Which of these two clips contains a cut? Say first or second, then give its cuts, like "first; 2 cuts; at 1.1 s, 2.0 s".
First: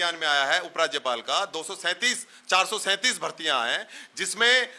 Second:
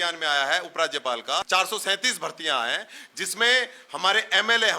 second; 1 cut; at 1.4 s